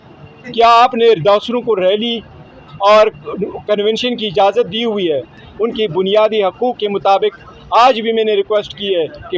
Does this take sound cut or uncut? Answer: cut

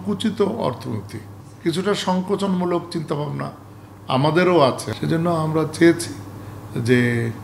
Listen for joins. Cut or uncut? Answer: uncut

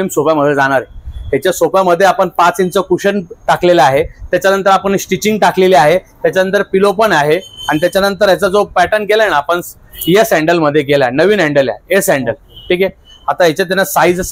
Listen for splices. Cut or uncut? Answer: uncut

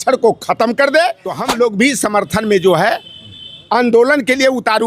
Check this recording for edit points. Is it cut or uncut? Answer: cut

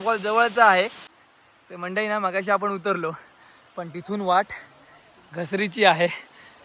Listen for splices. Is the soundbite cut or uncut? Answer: cut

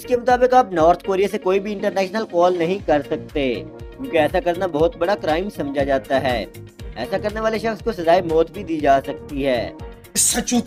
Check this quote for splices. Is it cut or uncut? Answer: uncut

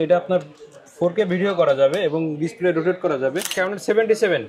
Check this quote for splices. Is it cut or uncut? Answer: cut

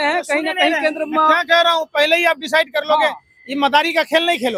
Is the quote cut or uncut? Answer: uncut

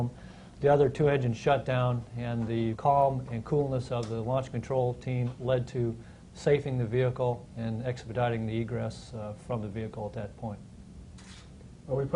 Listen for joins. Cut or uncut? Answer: cut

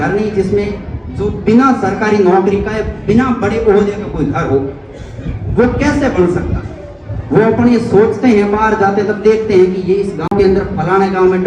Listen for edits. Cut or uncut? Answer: cut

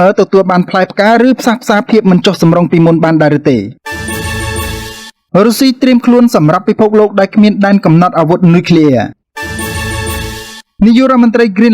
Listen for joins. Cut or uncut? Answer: cut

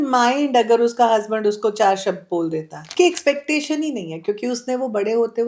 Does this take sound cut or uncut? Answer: cut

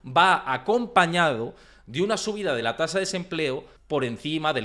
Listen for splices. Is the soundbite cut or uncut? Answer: cut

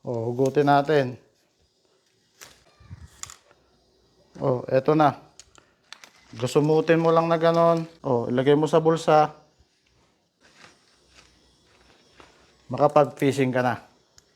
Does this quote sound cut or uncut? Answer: cut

